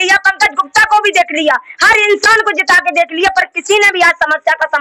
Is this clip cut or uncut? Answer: uncut